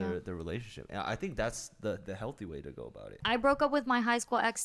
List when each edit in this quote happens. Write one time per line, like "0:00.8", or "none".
0:03.2